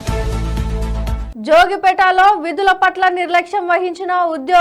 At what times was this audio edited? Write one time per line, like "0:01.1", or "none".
0:01.2